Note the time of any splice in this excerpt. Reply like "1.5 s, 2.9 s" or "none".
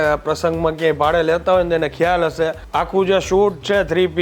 2.6 s